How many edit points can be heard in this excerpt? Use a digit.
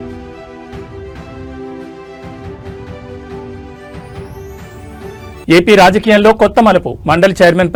0